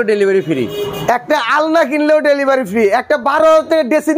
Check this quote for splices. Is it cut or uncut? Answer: uncut